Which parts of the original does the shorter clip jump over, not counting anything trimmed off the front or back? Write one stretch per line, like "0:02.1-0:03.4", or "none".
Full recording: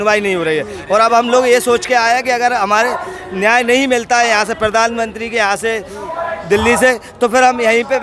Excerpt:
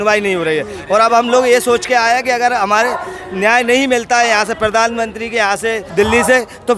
0:05.9-0:06.4